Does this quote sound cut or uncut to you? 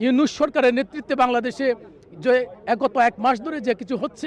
uncut